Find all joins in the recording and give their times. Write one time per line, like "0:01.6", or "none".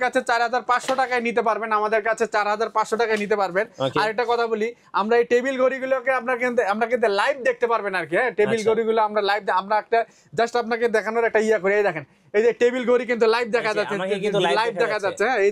none